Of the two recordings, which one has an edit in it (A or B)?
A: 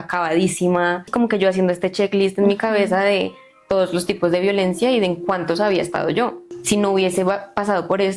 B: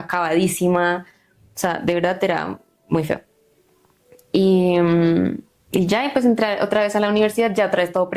A